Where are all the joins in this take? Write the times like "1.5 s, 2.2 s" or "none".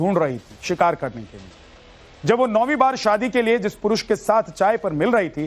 2.4 s